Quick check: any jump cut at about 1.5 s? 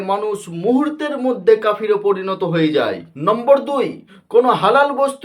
no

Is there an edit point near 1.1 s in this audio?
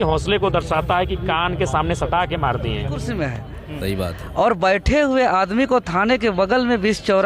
no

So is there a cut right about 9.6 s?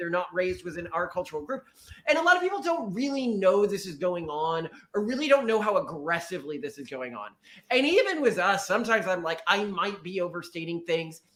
no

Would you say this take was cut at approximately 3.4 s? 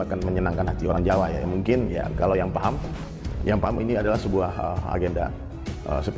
no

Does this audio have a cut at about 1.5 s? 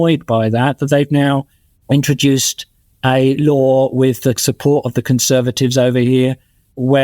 no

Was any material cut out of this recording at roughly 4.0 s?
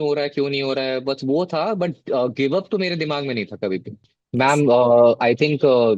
yes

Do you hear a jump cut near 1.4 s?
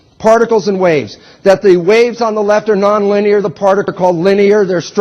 yes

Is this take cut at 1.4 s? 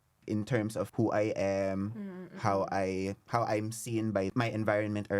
no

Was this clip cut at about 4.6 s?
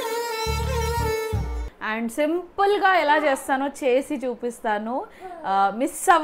no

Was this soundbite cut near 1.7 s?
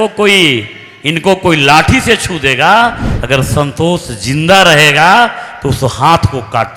no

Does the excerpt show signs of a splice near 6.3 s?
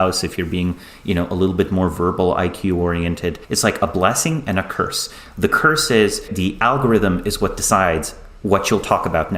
yes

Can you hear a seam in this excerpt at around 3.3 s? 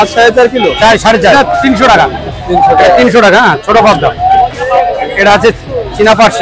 no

